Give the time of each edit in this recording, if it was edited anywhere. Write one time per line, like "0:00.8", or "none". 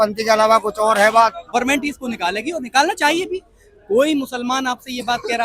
0:01.4